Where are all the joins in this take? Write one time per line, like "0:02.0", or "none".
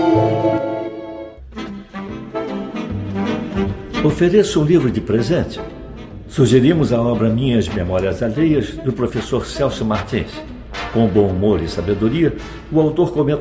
0:01.4